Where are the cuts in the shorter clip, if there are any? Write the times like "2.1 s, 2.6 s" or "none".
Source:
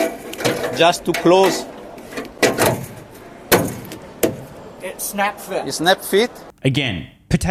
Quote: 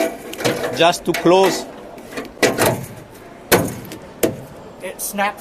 none